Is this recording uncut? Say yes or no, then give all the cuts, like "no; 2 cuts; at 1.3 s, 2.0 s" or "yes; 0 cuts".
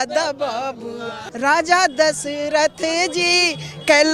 no; 1 cut; at 1.2 s